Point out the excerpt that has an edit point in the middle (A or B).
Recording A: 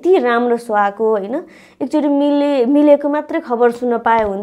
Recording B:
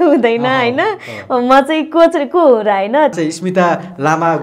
B